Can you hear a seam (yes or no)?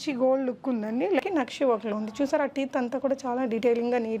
yes